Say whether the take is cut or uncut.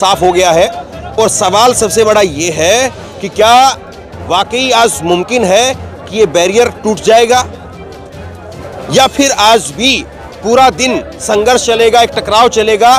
uncut